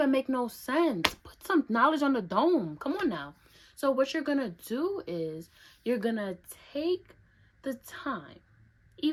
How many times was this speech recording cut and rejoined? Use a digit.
0